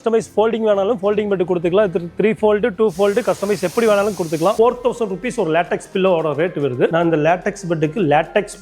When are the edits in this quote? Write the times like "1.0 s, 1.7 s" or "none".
4.5 s, 6.9 s